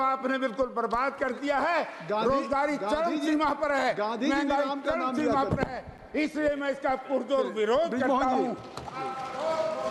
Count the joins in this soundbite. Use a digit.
0